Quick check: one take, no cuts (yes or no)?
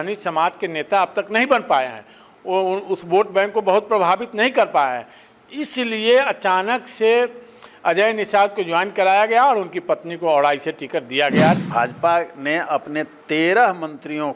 no